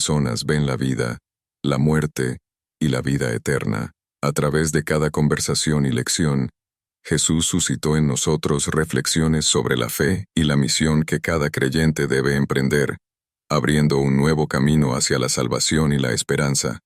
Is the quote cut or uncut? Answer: cut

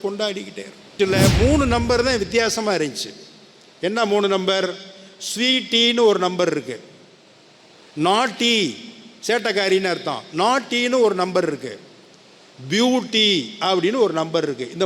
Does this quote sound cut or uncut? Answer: cut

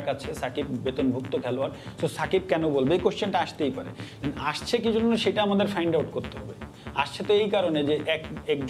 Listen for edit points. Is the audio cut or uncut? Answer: uncut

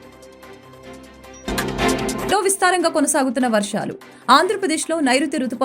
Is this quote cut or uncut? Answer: cut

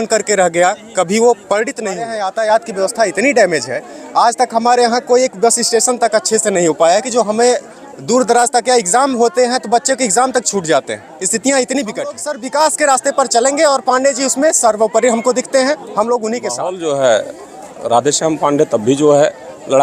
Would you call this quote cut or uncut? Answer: cut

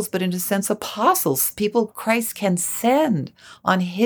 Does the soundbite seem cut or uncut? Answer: cut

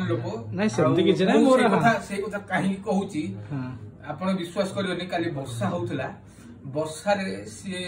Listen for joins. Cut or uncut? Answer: cut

